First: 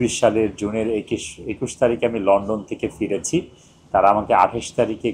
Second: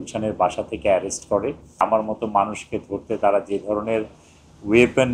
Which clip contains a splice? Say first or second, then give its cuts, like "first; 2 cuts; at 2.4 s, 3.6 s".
second; 1 cut; at 1.8 s